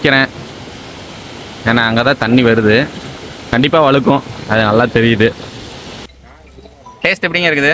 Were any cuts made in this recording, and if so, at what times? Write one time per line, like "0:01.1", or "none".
0:05.9